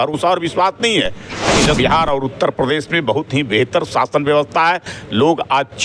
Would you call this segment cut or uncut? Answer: cut